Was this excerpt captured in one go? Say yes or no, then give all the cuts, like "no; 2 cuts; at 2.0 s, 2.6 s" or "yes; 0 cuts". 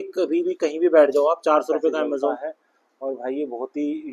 no; 1 cut; at 2.4 s